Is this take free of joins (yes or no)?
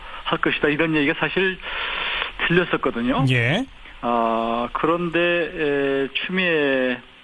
no